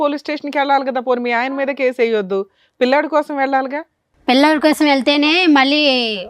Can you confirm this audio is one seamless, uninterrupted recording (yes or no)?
yes